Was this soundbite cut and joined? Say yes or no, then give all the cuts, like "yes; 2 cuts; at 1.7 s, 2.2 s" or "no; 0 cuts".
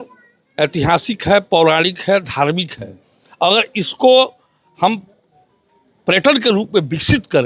no; 0 cuts